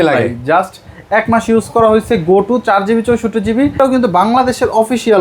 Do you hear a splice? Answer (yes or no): yes